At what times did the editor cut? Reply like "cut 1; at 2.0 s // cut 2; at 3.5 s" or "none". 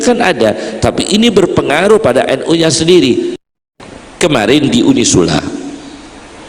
cut 1; at 3.4 s